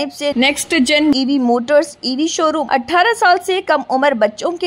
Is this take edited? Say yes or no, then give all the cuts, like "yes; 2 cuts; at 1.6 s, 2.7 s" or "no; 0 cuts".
yes; 1 cut; at 2.6 s